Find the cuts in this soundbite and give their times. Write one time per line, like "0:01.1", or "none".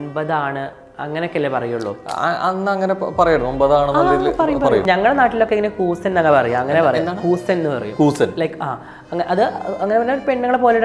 0:04.8